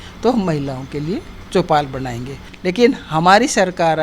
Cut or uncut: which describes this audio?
cut